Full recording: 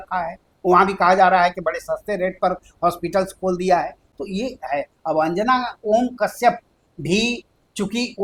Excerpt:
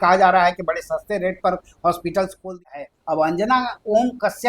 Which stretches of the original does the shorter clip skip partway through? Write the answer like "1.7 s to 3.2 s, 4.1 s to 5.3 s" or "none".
3.5 s to 4.5 s